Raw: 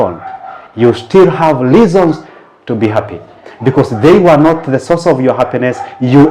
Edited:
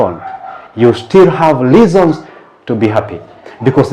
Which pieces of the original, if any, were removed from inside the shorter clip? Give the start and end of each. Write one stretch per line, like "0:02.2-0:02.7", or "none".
none